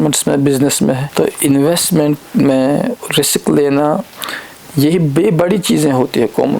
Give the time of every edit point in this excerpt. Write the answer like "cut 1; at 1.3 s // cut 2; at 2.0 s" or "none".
cut 1; at 1.1 s